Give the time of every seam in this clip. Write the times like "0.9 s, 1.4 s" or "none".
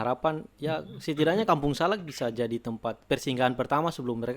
3.0 s